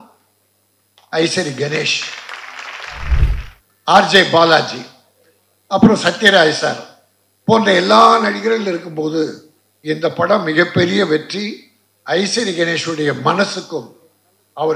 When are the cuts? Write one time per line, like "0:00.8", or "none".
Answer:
0:03.2